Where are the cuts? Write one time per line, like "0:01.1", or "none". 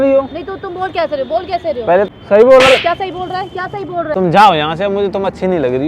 0:02.1
0:04.1